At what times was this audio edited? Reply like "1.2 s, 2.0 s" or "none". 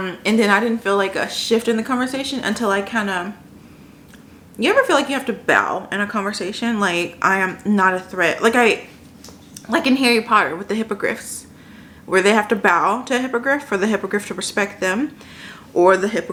none